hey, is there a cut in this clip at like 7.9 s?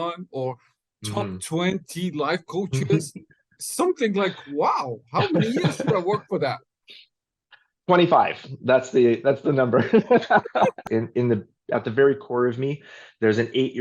no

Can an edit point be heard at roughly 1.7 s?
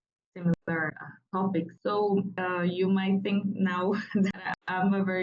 yes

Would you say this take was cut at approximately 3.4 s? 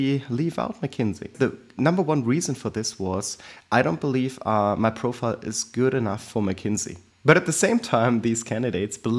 no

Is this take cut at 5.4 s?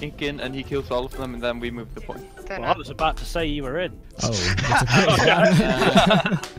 no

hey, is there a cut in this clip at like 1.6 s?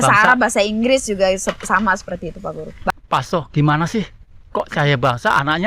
no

